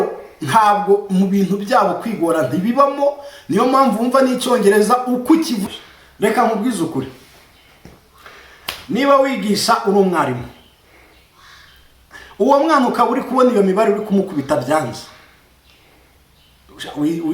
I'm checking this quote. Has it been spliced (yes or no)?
yes